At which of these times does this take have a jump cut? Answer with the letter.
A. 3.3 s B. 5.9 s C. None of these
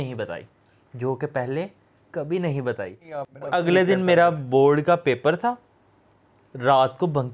A